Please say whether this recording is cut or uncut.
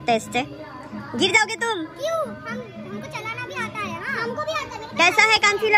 uncut